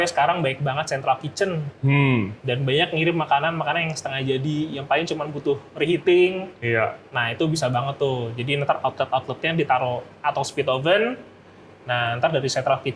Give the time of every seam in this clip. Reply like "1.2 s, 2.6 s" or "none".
none